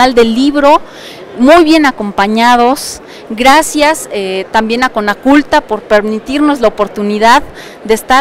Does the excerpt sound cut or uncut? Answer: uncut